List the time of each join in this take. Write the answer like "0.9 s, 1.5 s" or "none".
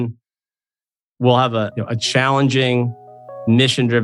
none